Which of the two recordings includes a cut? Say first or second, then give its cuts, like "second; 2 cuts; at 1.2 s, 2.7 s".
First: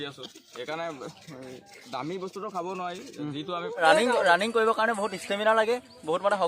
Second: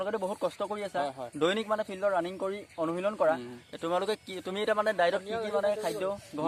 first; 1 cut; at 3.6 s